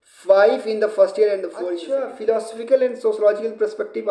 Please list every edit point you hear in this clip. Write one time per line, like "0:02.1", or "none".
0:01.7